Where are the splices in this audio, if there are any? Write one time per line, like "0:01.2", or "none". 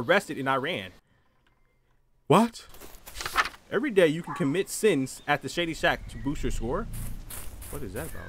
none